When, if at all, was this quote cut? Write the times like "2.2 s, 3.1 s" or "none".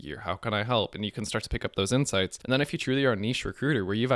2.4 s